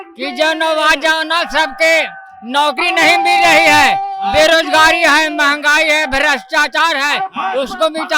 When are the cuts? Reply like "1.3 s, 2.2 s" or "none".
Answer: none